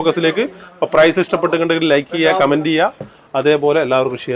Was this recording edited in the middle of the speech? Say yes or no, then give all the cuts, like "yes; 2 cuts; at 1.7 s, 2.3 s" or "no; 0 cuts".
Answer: no; 0 cuts